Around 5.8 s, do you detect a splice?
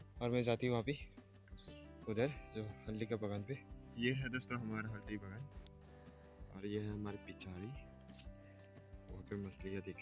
no; 1 cut; at 3.8 s

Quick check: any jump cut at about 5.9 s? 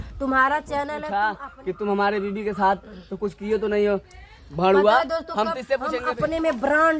yes; 2 cuts; at 1.0 s, 5.9 s

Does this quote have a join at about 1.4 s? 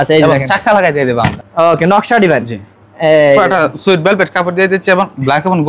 yes; 1 cut; at 1.4 s

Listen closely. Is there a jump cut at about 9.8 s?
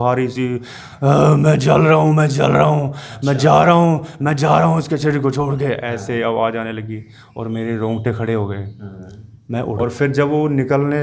yes; 1 cut; at 9.8 s

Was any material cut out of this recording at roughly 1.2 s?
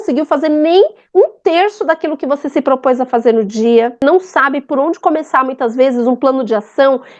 no; 1 cut; at 4.0 s

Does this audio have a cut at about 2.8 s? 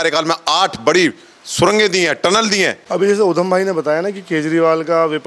yes; 1 cut; at 2.8 s

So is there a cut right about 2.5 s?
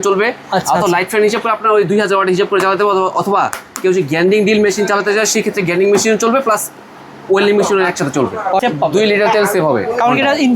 no; 1 cut; at 8.6 s

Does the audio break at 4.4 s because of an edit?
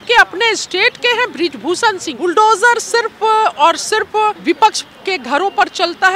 yes; 2 cuts; at 2.1 s, 4.4 s

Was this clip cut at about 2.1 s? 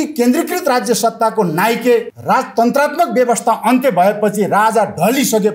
yes; 1 cut; at 2.1 s

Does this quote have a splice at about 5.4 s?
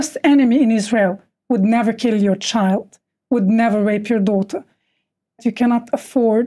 yes; 1 cut; at 5.4 s

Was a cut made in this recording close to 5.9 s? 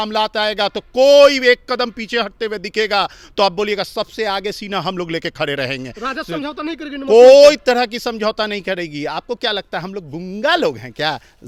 no; 0 cuts

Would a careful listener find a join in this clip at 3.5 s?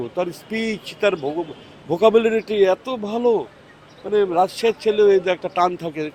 no; 0 cuts

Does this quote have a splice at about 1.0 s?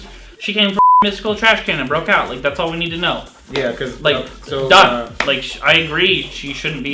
yes; 1 cut; at 1.0 s

